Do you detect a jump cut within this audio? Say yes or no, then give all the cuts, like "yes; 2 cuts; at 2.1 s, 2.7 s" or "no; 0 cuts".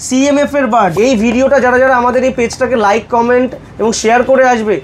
yes; 1 cut; at 0.9 s